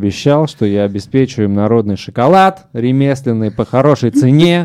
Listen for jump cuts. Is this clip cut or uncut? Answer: uncut